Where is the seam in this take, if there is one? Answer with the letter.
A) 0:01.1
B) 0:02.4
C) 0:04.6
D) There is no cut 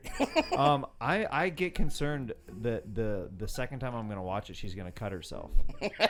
D